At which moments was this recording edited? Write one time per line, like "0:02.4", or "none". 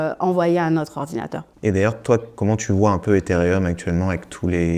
0:01.4

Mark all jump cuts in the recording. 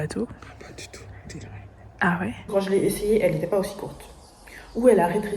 0:02.5

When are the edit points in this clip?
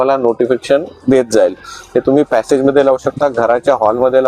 none

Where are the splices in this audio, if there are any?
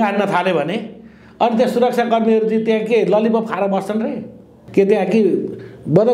0:04.6

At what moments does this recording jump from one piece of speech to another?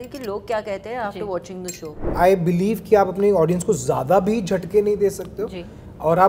0:02.0

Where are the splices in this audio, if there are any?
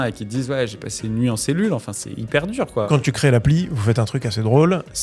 0:00.8
0:02.9

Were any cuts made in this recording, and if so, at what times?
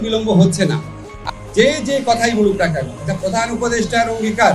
0:01.3

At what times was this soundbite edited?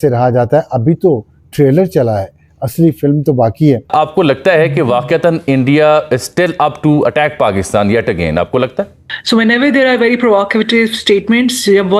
0:03.9
0:09.2

